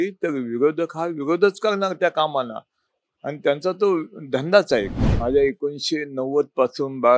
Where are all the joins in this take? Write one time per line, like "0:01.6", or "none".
0:05.0